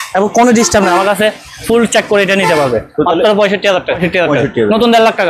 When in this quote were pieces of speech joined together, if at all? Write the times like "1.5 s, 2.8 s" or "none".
4.0 s

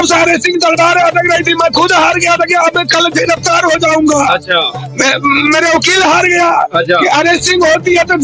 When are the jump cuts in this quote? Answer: none

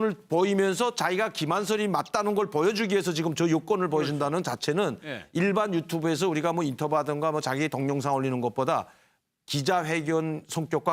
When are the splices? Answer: none

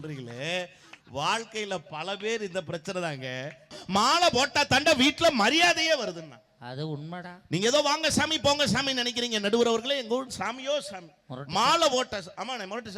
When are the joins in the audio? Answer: 3.8 s

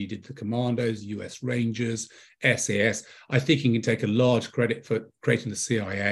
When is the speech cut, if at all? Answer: none

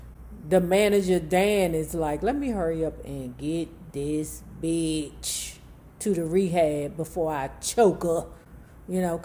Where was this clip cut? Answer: none

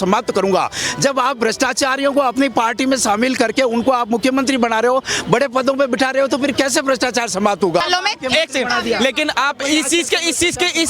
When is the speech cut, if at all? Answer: 7.8 s

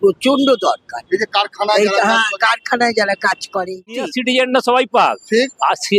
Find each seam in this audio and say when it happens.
4.1 s

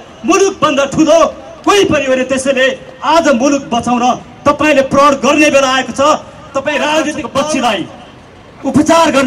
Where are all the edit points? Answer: 7.2 s

